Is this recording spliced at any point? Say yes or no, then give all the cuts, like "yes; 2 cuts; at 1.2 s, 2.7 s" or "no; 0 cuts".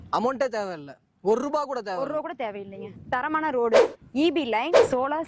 yes; 1 cut; at 3.0 s